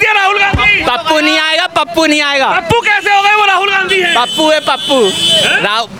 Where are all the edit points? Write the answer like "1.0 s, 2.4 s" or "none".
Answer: none